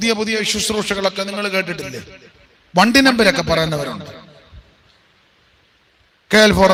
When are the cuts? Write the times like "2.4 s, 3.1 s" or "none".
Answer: none